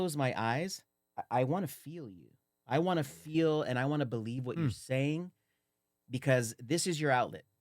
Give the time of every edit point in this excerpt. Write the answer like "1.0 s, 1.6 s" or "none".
none